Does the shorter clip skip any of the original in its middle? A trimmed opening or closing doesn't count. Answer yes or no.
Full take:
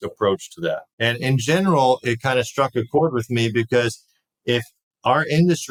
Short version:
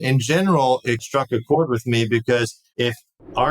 yes